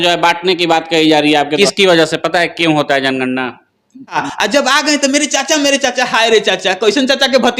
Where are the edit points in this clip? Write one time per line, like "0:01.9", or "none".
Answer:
0:01.5
0:04.3